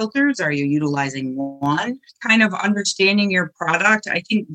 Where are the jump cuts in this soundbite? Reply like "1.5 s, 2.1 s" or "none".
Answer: 2.2 s